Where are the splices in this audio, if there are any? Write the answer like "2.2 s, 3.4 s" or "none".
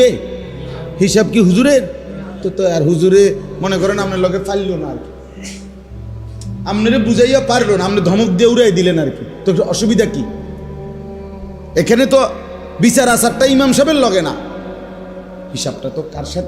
5.2 s, 6.6 s